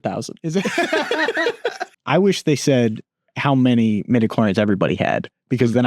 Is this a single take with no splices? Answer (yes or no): no